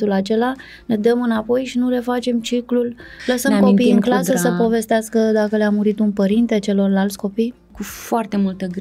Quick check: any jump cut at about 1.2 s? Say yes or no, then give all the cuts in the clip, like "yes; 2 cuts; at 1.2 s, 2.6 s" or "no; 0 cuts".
no; 2 cuts; at 3.1 s, 7.9 s